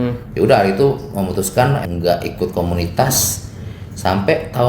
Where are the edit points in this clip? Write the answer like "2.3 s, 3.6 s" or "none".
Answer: 1.8 s

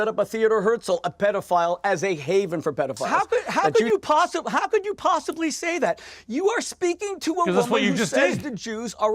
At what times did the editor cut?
3.0 s

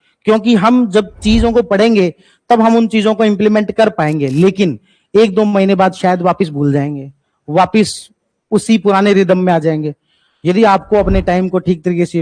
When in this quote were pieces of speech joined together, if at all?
none

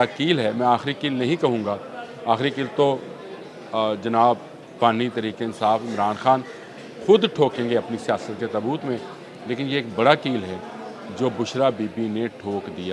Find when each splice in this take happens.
none

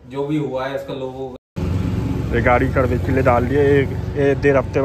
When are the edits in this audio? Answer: 1.3 s

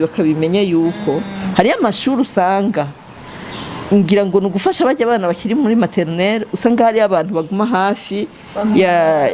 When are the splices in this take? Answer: none

